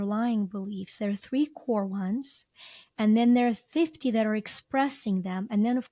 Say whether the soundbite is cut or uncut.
uncut